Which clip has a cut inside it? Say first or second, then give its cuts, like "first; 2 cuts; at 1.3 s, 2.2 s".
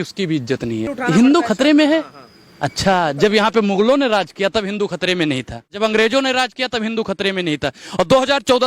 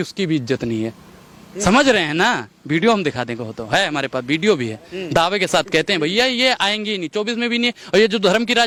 first; 2 cuts; at 0.9 s, 5.7 s